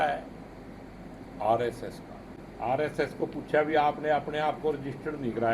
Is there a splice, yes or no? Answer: yes